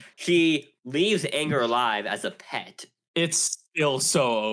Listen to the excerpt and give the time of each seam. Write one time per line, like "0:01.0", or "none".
0:03.4